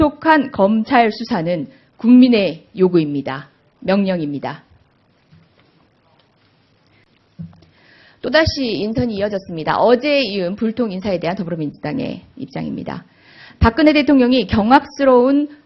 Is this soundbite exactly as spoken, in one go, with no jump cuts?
no; 1 cut; at 1.7 s

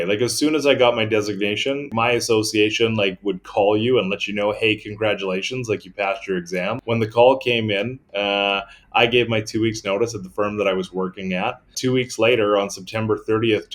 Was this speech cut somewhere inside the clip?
yes; 3 cuts; at 1.9 s, 6.8 s, 11.7 s

